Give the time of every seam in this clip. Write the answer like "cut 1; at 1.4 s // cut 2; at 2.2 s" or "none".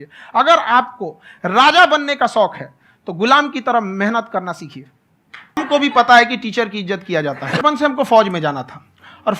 cut 1; at 5.6 s // cut 2; at 7.6 s